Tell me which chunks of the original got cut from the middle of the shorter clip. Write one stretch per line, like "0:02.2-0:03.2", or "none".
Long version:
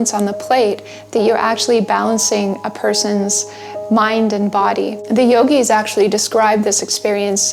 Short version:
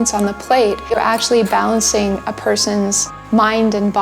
0:00.9-0:01.3
0:03.5-0:03.7